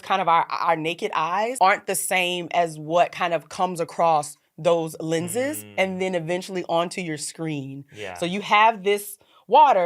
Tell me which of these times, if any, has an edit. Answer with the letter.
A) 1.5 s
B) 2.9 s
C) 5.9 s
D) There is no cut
A